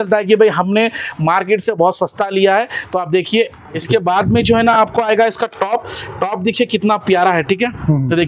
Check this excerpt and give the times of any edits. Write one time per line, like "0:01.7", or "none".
0:03.8